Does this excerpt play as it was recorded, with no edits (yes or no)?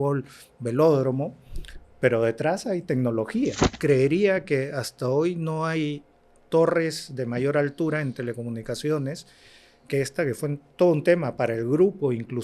no